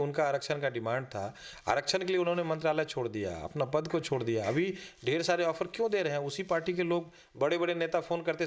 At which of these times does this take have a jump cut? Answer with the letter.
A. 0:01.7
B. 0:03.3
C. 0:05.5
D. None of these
D